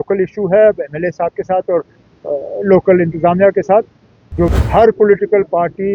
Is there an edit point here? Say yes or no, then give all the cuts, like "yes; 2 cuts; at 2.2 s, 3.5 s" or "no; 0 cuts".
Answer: yes; 1 cut; at 4.5 s